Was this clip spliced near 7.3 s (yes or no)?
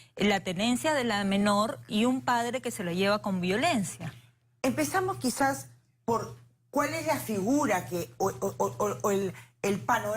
no